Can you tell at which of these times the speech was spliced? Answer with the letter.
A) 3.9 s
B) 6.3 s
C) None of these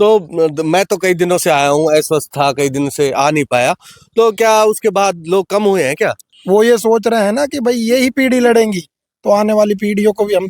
B